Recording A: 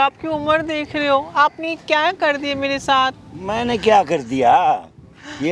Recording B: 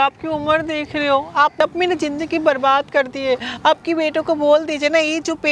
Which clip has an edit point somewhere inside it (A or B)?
B